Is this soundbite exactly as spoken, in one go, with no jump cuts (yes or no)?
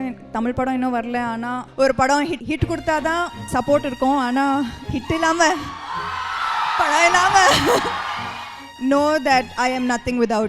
no